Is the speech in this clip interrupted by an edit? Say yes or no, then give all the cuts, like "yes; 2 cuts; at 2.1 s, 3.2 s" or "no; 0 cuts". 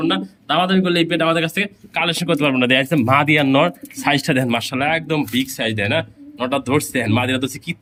no; 0 cuts